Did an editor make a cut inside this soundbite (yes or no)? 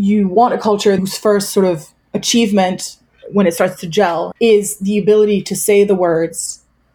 yes